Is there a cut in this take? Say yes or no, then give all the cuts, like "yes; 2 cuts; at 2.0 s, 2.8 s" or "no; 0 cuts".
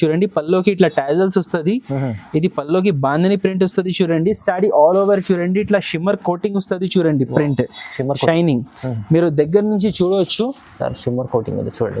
no; 0 cuts